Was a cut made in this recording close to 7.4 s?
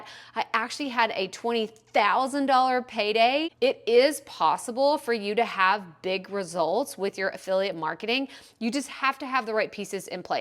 no; 1 cut; at 3.5 s

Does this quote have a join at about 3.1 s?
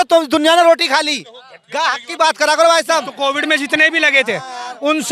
yes; 1 cut; at 3.1 s

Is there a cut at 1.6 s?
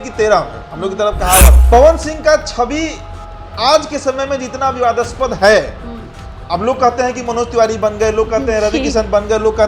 yes; 1 cut; at 1.6 s

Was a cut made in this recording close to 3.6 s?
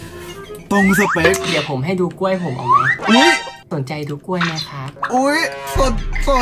no; 1 cut; at 1.4 s

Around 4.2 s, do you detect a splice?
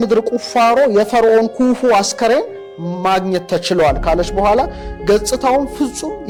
no; 0 cuts

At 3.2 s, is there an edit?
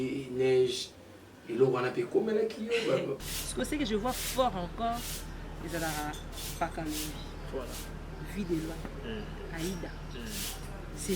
yes; 1 cut; at 3.2 s

